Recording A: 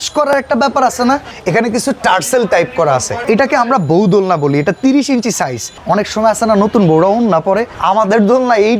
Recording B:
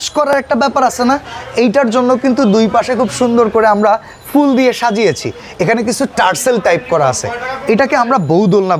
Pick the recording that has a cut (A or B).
A